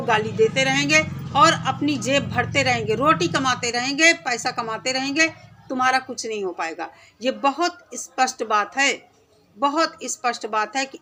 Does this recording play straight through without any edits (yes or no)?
yes